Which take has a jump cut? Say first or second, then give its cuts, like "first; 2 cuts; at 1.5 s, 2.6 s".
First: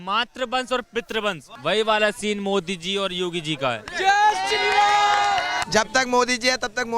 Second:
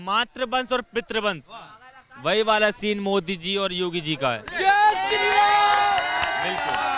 first; 2 cuts; at 1.5 s, 5.6 s